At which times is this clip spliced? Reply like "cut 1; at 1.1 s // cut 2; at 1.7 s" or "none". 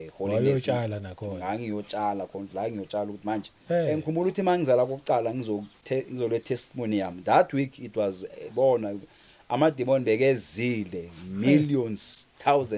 cut 1; at 4.0 s